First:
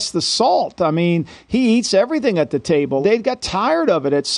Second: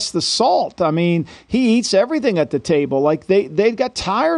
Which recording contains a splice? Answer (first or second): first